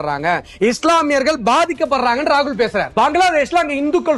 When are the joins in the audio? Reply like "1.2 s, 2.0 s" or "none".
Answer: 2.9 s